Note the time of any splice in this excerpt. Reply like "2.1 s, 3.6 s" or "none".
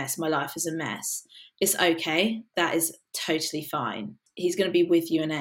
1.5 s, 2.5 s, 4.2 s